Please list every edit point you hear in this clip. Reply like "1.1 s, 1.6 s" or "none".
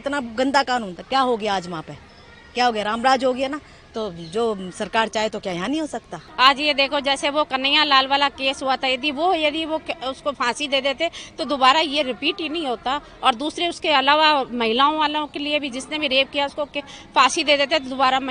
6.2 s